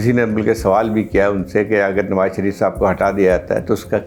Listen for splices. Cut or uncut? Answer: uncut